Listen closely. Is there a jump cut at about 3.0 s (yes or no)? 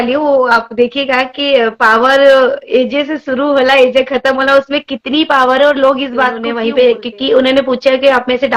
no